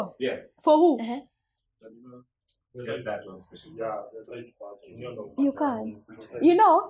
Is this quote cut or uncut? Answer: uncut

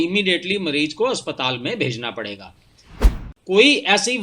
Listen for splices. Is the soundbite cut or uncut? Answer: cut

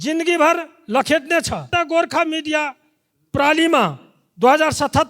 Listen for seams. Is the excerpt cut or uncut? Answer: cut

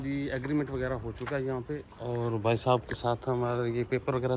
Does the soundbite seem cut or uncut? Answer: uncut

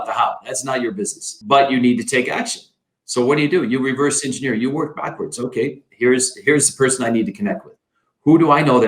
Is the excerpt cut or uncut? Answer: cut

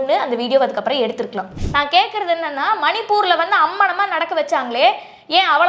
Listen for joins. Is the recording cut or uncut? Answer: cut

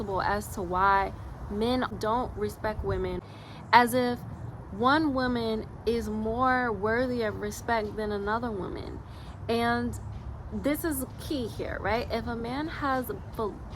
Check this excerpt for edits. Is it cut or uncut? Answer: cut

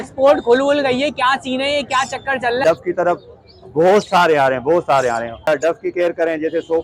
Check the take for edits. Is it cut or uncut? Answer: cut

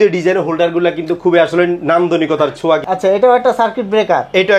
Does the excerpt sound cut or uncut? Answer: cut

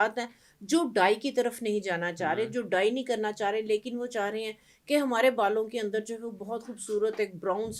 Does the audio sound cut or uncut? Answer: uncut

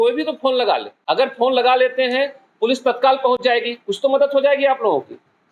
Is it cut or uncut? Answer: uncut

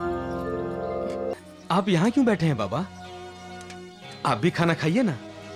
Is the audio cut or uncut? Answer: cut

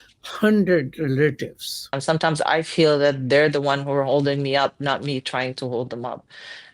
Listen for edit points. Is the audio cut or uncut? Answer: cut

